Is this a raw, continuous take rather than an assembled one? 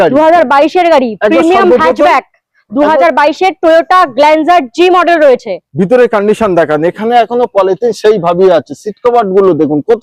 yes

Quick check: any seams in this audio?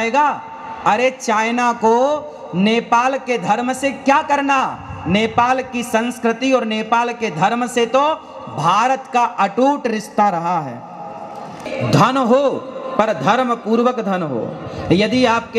yes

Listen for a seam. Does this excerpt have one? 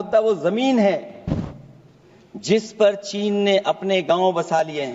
no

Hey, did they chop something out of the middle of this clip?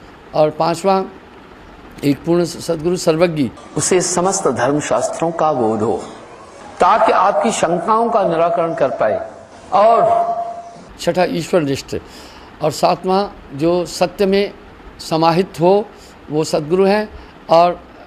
no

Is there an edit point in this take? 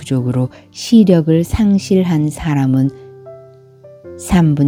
no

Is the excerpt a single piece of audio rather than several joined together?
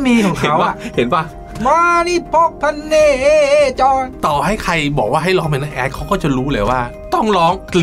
no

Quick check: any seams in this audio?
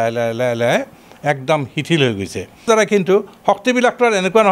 yes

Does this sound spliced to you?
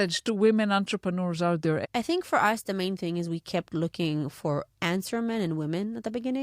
yes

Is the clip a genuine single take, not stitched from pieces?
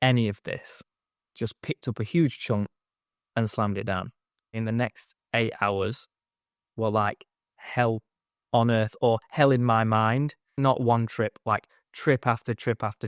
no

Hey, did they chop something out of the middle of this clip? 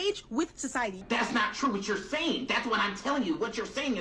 yes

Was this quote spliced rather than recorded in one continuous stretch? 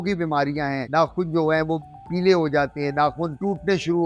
no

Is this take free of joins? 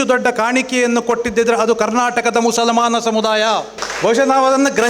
no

